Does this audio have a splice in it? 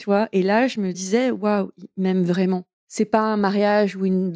yes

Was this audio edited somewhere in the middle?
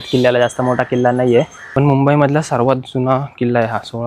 yes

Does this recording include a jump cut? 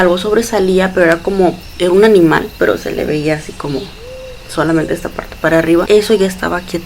yes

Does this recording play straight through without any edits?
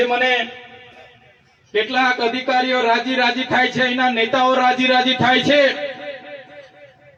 yes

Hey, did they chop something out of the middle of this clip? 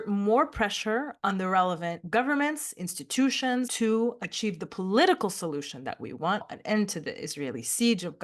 yes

